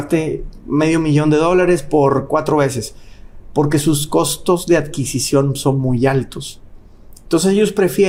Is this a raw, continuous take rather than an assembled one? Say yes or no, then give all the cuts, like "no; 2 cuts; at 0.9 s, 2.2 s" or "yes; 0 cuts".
yes; 0 cuts